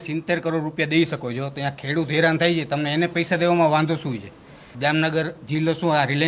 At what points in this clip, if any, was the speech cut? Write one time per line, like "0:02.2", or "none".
0:04.7